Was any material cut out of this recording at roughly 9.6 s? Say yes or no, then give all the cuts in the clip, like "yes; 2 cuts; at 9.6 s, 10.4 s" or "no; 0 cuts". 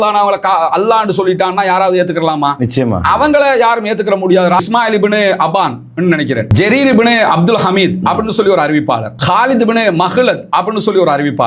no; 1 cut; at 4.6 s